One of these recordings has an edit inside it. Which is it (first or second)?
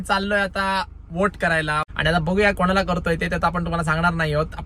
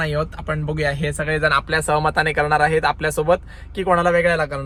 first